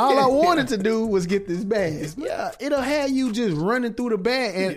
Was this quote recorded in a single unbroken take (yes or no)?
no